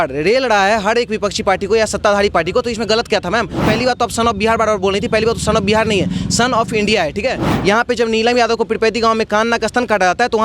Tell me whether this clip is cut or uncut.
cut